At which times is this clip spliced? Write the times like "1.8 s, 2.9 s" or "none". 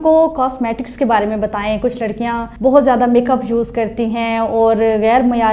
2.5 s